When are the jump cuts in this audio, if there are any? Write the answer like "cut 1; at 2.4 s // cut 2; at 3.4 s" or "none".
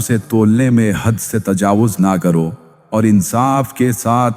cut 1; at 2.7 s